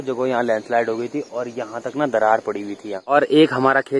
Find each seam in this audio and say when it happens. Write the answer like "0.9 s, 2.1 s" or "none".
2.9 s